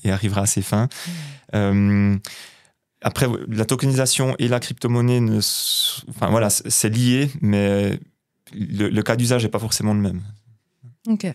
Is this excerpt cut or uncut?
uncut